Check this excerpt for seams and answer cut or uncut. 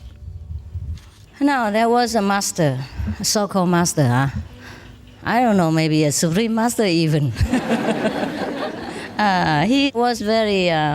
cut